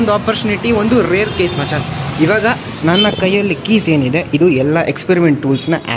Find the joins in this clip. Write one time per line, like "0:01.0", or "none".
none